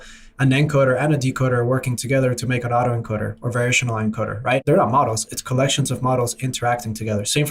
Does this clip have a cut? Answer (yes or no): no